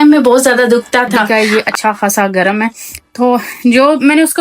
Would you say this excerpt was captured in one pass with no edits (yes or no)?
no